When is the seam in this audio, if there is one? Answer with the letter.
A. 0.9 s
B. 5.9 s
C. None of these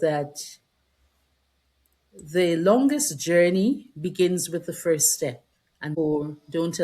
B